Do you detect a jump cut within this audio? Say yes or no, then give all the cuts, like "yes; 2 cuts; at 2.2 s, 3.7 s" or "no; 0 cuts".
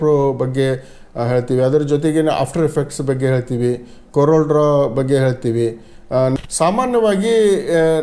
yes; 1 cut; at 6.4 s